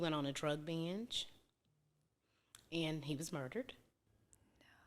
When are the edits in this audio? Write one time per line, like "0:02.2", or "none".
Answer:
none